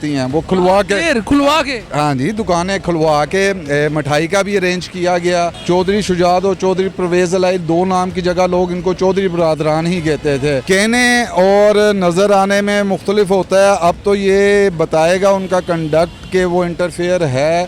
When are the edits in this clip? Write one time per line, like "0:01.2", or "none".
0:05.6
0:10.6